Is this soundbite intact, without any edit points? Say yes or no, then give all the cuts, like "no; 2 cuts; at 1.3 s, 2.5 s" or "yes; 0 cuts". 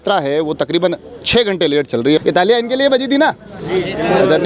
no; 1 cut; at 2.2 s